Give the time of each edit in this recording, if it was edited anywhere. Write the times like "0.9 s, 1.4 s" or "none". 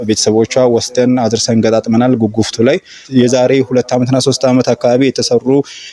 3.0 s